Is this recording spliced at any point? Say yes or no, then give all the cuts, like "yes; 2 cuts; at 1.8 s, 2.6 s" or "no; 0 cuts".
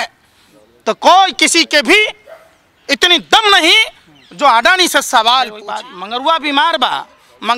yes; 1 cut; at 5.7 s